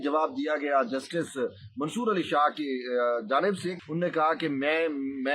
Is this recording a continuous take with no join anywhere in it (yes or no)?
no